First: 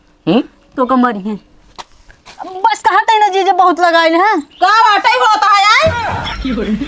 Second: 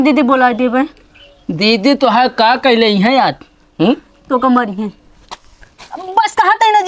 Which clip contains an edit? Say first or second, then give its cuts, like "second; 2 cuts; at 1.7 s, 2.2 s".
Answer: first; 1 cut; at 6.0 s